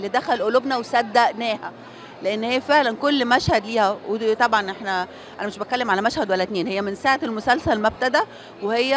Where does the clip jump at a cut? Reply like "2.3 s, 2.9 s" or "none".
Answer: none